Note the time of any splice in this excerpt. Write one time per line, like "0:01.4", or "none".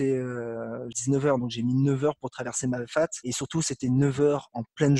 0:00.9